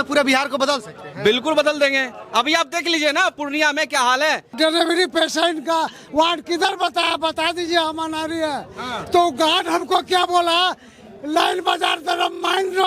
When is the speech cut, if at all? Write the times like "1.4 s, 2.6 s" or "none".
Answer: 4.6 s

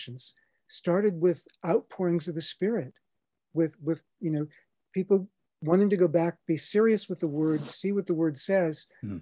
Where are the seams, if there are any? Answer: none

